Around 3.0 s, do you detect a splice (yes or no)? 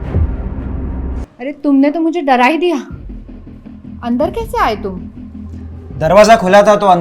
no